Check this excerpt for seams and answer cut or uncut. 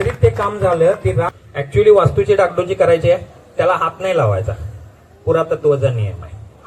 cut